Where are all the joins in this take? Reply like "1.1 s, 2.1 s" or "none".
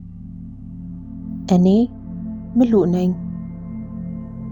3.2 s